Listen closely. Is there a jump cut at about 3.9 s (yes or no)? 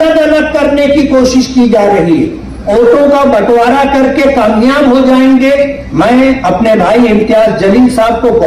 no